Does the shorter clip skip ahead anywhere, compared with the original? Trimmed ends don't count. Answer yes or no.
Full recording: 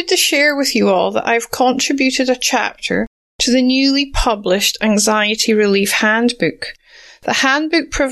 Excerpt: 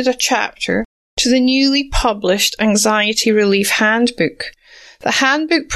no